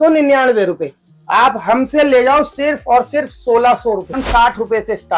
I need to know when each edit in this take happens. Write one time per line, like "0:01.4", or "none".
0:04.2